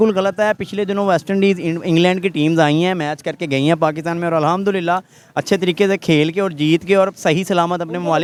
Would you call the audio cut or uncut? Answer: uncut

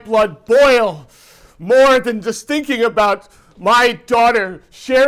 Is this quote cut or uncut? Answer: uncut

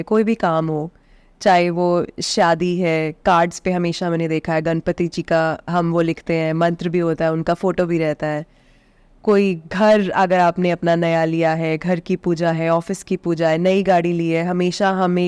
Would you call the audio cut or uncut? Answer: uncut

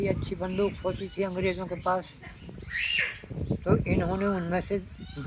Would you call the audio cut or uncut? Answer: uncut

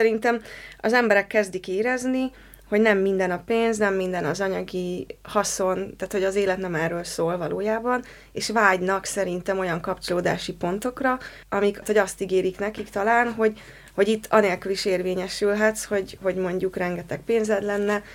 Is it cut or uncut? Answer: uncut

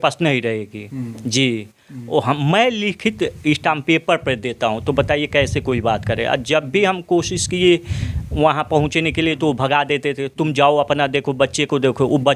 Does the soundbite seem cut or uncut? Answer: uncut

